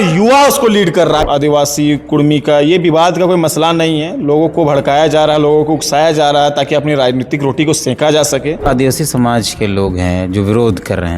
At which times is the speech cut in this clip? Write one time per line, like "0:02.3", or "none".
0:01.2
0:08.7